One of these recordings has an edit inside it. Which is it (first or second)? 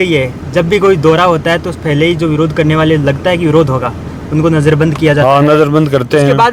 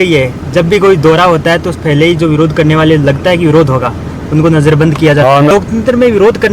second